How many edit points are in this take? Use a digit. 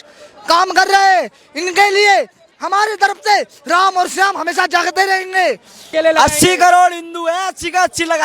1